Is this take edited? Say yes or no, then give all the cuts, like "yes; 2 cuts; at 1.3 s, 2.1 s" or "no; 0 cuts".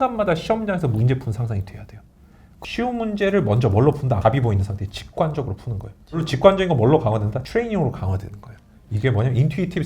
yes; 4 cuts; at 2.5 s, 4.2 s, 6.3 s, 7.4 s